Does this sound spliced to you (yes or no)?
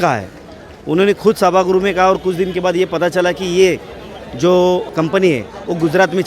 yes